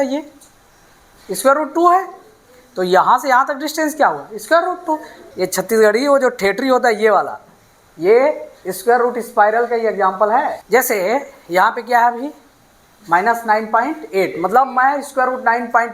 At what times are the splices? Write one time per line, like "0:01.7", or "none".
0:05.1
0:10.6